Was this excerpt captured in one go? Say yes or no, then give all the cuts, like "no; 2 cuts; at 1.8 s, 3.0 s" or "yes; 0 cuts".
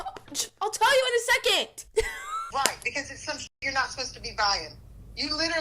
no; 1 cut; at 2.4 s